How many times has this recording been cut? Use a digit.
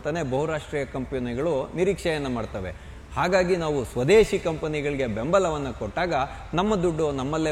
0